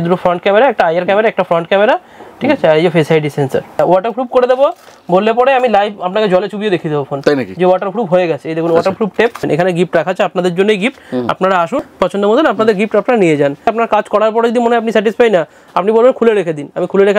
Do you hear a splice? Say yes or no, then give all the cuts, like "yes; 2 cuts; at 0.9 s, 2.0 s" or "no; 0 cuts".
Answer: yes; 4 cuts; at 3.8 s, 9.4 s, 11.8 s, 13.7 s